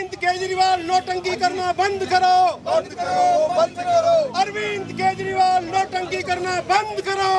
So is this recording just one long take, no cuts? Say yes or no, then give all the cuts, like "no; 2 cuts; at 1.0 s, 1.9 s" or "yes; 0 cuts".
yes; 0 cuts